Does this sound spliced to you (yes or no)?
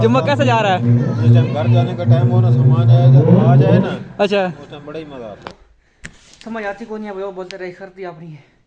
yes